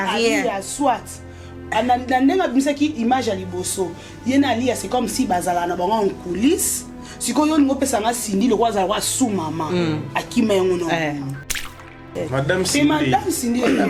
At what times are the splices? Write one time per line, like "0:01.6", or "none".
0:11.9